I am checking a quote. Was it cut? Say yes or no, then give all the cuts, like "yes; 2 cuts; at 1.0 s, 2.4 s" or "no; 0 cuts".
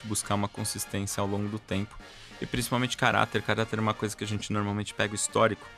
yes; 1 cut; at 2.2 s